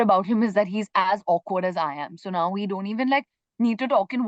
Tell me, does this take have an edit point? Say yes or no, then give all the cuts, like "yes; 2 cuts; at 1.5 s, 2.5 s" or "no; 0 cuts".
no; 0 cuts